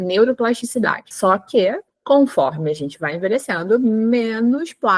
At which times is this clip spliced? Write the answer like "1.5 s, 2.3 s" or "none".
1.0 s